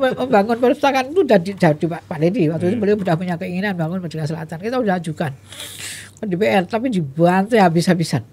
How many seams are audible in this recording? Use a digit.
0